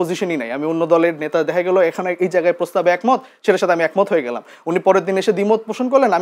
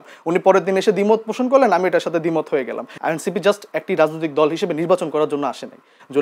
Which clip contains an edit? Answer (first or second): second